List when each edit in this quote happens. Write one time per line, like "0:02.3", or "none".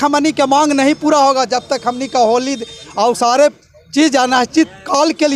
none